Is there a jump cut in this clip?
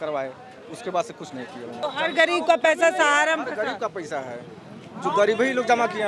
yes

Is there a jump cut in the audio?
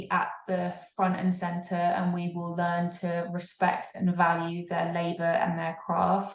no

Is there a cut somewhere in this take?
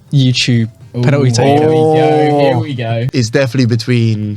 yes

